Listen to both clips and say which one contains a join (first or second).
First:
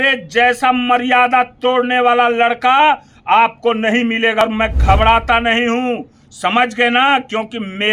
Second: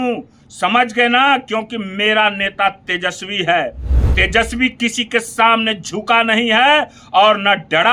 first